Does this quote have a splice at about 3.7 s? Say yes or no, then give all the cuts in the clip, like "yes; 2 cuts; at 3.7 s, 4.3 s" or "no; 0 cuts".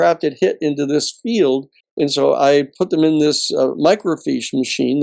no; 1 cut; at 1.8 s